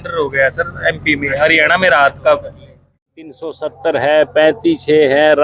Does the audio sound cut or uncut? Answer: cut